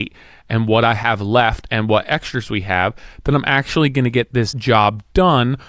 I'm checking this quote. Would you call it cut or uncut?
cut